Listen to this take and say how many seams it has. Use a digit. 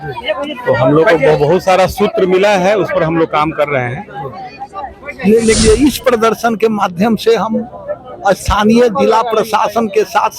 1